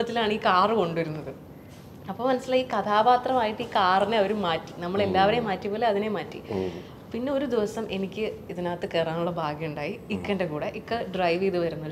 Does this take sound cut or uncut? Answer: uncut